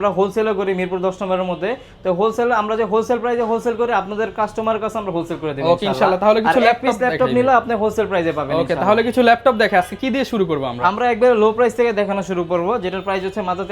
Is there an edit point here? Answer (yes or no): no